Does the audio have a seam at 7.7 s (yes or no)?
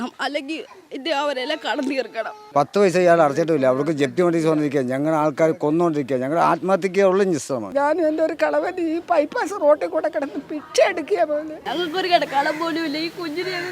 yes